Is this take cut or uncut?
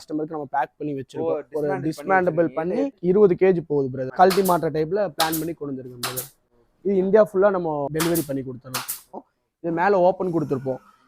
cut